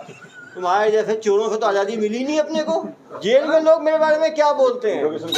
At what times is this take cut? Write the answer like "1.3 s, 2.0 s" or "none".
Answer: 3.0 s